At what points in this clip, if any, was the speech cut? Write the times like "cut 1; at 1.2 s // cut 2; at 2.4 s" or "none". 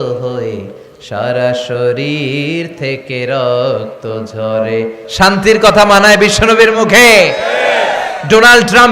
cut 1; at 5.0 s